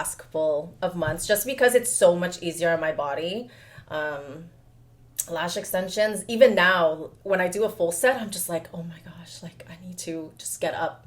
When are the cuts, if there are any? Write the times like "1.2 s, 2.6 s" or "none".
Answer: none